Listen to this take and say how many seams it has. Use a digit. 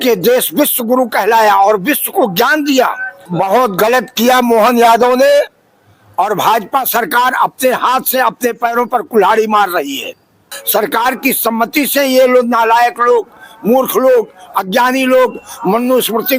2